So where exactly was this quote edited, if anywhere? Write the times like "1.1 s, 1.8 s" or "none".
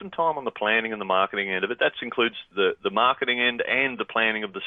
none